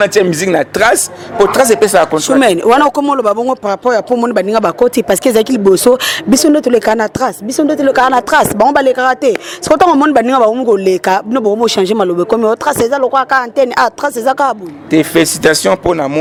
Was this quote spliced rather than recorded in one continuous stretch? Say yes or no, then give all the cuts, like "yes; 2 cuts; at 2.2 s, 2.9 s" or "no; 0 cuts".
no; 0 cuts